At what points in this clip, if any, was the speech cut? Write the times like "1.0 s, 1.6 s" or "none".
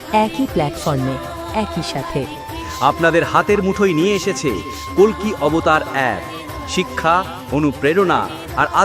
none